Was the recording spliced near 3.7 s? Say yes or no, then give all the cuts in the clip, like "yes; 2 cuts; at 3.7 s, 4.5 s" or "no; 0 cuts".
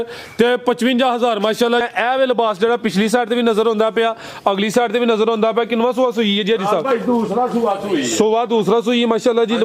no; 1 cut; at 1.8 s